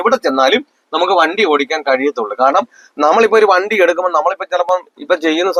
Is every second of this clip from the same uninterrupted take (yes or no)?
yes